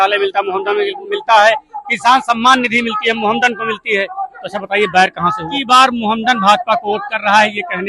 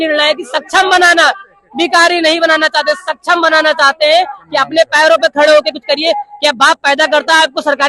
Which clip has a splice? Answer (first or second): first